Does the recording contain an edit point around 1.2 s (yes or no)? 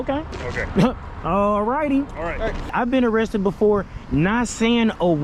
no